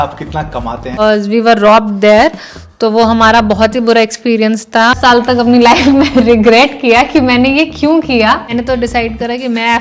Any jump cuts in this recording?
yes; 3 cuts; at 1.0 s, 5.4 s, 8.5 s

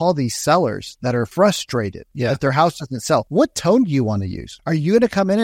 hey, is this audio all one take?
no; 4 cuts; at 1.3 s, 2.0 s, 3.3 s, 4.5 s

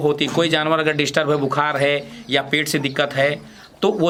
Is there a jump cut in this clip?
no; 0 cuts

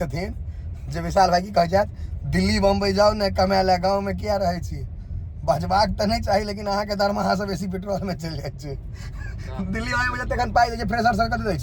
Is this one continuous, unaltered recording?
yes; 0 cuts

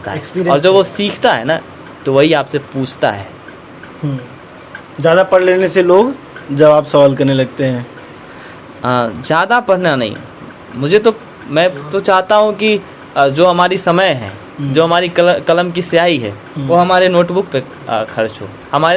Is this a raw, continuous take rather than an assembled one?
yes; 0 cuts

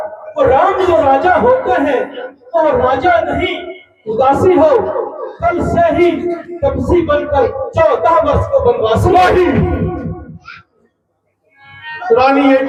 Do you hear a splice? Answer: no; 0 cuts

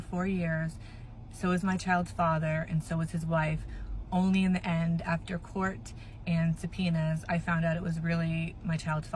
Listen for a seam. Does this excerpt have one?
no; 0 cuts

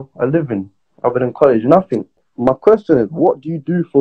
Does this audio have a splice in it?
yes; 1 cut; at 2.2 s

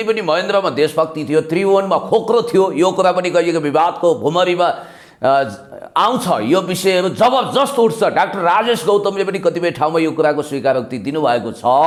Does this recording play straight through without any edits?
yes; 0 cuts

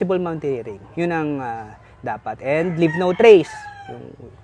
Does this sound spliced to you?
no; 0 cuts

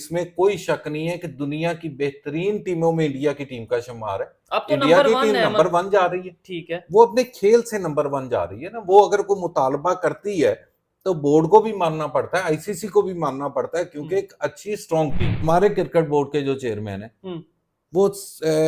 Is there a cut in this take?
yes; 1 cut; at 15.3 s

